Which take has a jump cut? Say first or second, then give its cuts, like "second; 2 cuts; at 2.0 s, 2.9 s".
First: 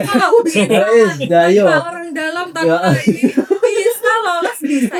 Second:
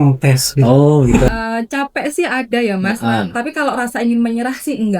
second; 1 cut; at 1.3 s